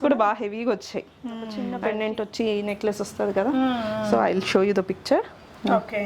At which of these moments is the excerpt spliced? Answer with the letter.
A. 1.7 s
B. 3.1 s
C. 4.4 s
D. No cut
A